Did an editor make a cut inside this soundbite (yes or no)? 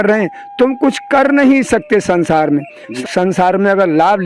yes